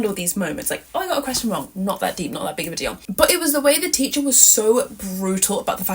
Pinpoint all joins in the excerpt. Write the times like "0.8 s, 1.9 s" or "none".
3.0 s